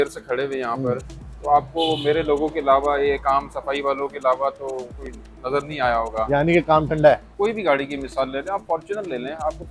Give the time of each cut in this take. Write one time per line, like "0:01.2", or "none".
0:07.3